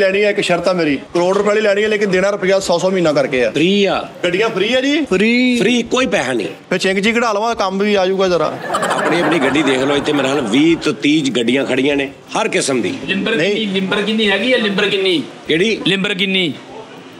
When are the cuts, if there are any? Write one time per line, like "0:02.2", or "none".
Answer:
0:01.0
0:03.5
0:04.1
0:05.1
0:12.2